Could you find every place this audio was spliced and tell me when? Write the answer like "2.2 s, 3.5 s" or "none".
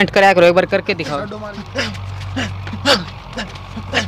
1.1 s